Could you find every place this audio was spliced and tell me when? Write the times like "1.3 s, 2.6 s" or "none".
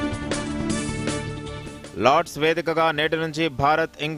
1.7 s

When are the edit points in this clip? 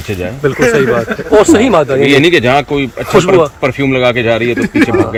none

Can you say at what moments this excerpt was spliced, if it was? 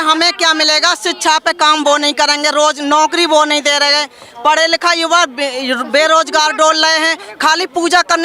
none

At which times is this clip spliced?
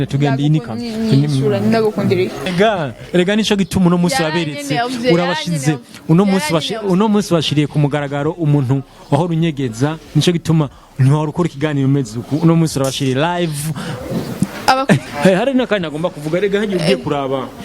2.4 s, 15.1 s

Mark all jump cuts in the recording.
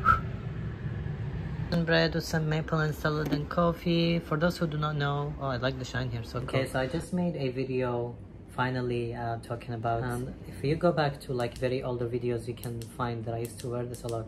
6.3 s, 10.0 s

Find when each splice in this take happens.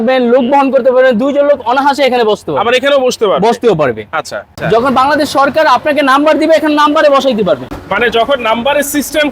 4.4 s, 7.7 s

